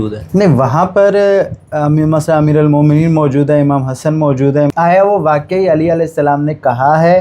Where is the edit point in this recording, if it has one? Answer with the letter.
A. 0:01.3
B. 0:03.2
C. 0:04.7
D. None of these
C